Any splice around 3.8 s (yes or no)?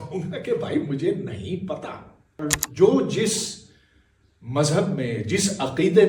no